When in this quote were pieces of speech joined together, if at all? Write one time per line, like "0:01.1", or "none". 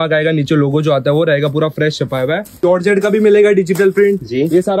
0:02.6